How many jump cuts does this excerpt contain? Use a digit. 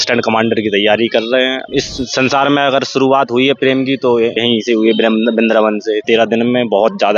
3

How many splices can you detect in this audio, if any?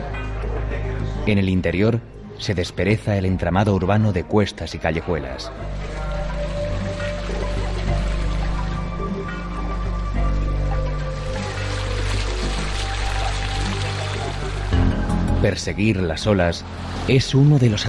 0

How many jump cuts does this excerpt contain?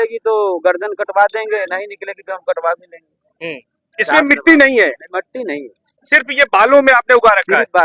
0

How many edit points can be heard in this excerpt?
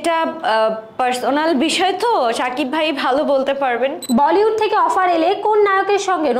1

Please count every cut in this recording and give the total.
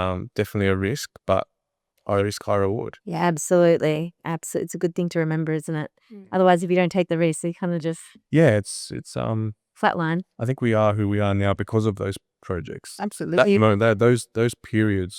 1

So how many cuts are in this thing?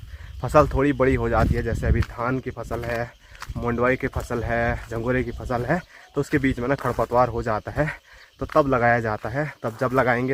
0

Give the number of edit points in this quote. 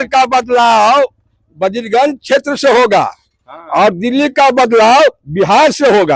0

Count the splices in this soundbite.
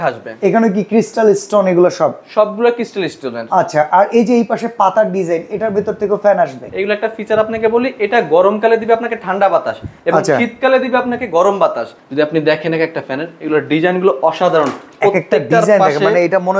2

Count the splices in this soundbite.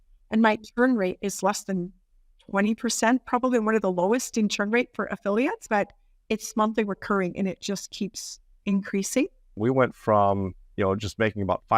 2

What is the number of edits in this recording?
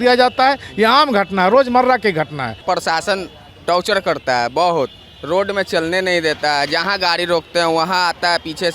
1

